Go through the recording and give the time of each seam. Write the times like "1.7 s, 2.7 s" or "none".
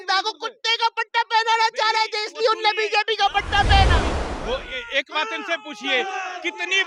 4.1 s